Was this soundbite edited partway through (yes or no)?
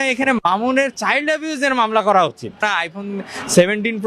yes